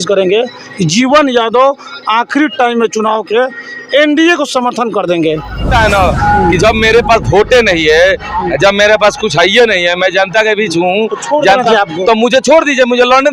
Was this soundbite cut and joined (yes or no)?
yes